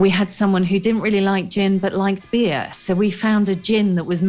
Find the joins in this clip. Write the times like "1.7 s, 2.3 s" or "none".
none